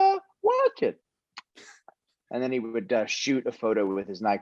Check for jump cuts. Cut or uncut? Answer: uncut